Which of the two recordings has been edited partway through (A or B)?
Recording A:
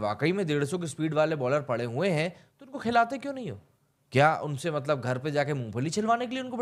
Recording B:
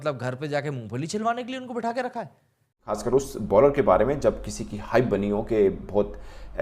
B